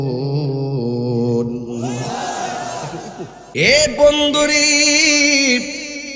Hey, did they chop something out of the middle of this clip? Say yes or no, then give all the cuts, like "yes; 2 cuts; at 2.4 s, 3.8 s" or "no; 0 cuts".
yes; 1 cut; at 3.4 s